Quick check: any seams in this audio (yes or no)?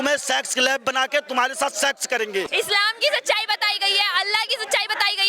yes